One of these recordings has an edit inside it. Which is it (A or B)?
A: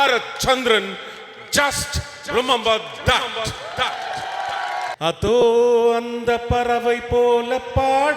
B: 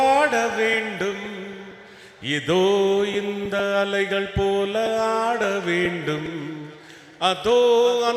A